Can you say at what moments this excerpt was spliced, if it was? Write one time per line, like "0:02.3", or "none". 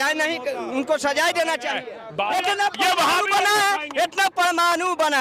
0:02.3